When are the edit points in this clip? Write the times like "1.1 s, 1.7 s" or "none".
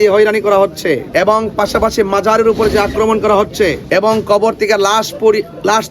1.1 s, 3.8 s